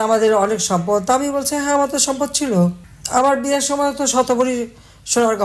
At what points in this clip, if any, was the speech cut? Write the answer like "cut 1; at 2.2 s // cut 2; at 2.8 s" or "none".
none